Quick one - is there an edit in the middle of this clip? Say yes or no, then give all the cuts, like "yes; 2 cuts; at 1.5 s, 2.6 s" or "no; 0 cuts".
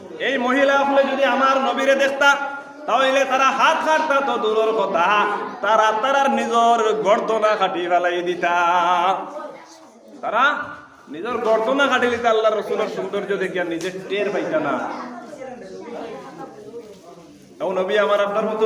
no; 0 cuts